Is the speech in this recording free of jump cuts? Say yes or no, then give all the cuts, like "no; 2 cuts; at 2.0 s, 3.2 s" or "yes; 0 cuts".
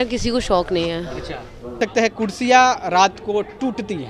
no; 1 cut; at 1.8 s